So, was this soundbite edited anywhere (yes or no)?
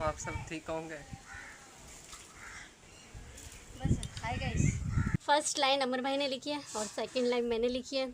yes